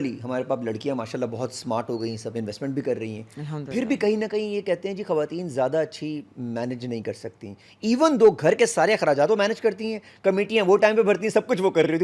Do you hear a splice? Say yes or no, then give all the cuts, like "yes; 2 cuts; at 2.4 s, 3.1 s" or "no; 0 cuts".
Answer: no; 0 cuts